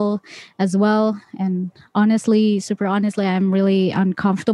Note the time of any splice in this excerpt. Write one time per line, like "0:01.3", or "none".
none